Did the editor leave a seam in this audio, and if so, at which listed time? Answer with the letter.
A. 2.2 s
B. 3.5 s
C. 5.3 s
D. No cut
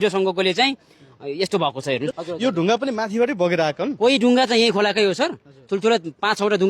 A